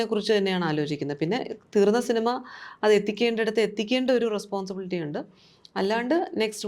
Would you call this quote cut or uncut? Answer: uncut